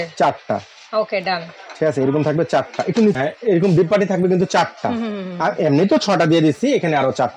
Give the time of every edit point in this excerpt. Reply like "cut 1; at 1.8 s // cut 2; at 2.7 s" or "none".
none